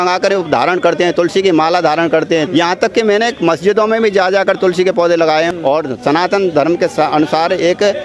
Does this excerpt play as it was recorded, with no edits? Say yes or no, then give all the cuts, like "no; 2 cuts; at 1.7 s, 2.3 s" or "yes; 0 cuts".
no; 2 cuts; at 2.5 s, 5.5 s